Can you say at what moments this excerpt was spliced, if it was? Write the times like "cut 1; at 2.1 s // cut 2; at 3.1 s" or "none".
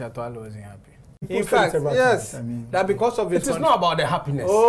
cut 1; at 1.3 s